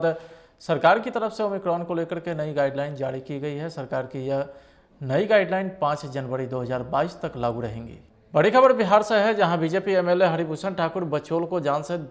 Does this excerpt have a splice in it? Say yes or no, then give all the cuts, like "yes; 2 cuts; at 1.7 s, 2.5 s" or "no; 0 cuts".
yes; 1 cut; at 8.3 s